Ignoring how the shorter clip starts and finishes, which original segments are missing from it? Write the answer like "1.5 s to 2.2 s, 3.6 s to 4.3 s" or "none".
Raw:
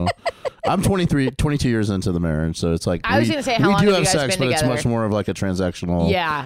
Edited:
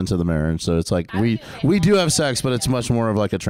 none